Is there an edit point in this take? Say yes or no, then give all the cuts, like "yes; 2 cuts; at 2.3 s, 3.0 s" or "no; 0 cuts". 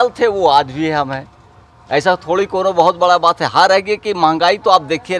no; 0 cuts